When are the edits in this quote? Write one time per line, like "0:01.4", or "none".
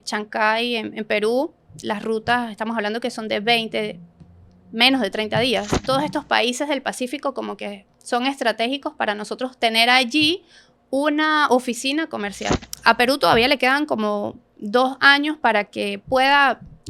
0:05.8
0:12.7